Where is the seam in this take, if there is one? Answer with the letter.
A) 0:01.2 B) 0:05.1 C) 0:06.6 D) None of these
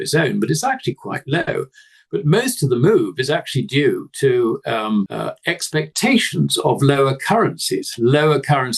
B